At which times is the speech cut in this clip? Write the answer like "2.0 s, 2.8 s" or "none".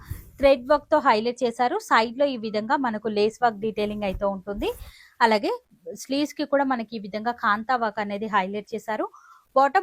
none